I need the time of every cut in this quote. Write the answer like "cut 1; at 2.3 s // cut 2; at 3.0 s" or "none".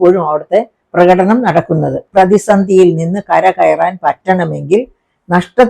cut 1; at 2.0 s